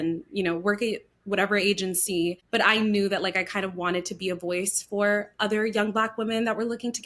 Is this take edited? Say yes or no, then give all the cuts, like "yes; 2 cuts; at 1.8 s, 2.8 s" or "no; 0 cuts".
yes; 1 cut; at 2.4 s